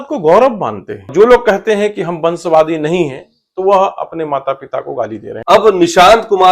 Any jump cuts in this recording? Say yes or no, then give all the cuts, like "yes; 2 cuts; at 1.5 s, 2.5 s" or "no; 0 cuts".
yes; 2 cuts; at 1.1 s, 5.3 s